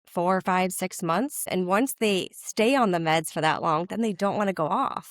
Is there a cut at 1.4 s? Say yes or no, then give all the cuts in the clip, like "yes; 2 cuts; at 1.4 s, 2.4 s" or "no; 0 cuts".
yes; 1 cut; at 1.4 s